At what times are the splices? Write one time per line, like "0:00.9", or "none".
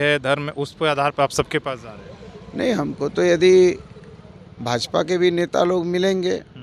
none